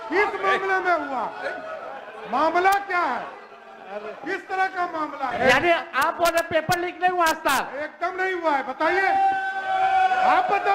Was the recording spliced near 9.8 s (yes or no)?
no